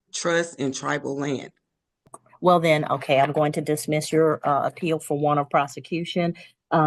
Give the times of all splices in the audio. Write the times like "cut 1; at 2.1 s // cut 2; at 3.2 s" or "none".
cut 1; at 2.2 s